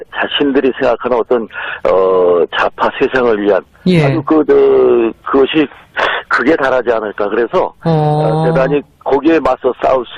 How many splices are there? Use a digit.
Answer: 0